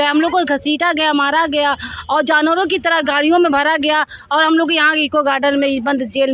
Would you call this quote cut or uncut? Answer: uncut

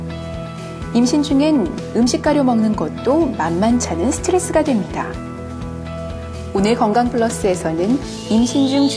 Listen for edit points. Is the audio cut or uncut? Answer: cut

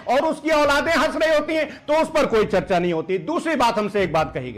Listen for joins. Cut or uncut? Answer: uncut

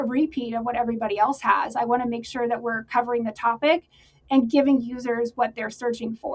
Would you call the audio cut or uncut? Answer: uncut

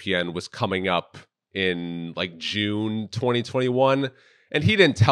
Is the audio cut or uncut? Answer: uncut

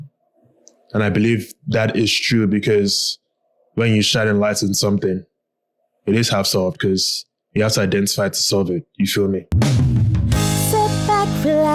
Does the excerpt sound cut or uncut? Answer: cut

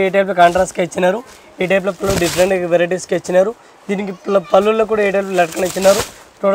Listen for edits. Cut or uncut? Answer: uncut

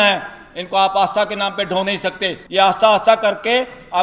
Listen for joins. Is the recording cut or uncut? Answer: cut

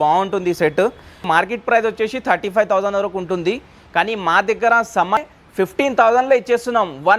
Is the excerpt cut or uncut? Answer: cut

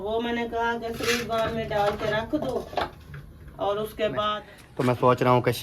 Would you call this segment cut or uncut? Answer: cut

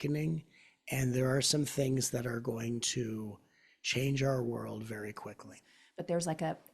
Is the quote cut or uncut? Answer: cut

